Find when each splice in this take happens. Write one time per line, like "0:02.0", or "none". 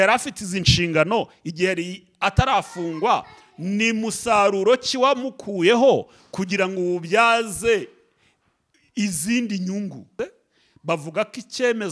0:10.0

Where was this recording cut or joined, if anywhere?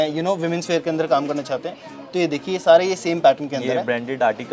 none

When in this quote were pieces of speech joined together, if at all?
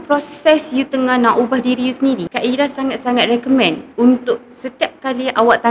none

